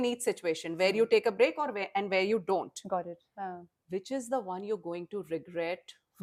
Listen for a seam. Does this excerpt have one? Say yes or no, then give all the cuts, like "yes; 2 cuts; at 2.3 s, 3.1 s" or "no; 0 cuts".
no; 0 cuts